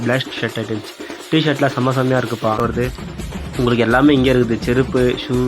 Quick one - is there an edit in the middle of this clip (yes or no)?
yes